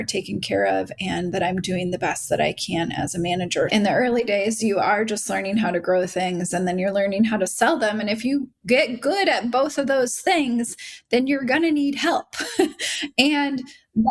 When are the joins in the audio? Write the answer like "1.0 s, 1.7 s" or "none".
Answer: 3.7 s